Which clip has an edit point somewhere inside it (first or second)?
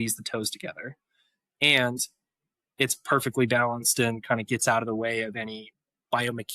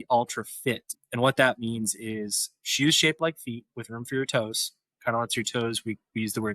second